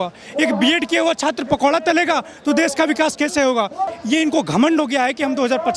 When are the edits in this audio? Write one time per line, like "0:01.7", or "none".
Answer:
0:03.9